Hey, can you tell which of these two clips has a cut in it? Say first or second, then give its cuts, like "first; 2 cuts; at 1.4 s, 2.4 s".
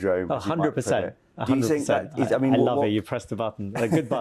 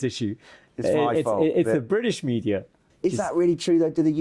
second; 1 cut; at 2.8 s